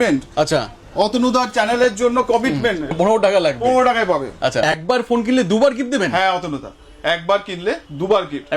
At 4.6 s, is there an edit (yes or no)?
yes